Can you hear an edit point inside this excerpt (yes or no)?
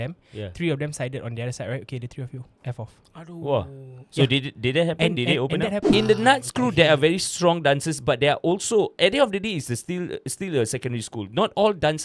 yes